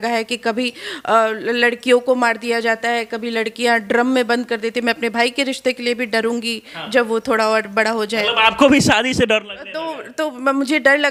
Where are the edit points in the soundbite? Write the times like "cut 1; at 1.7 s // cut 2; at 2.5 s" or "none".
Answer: none